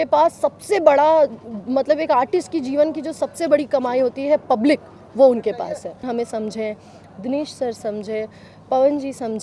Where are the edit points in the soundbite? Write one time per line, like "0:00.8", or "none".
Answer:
0:06.0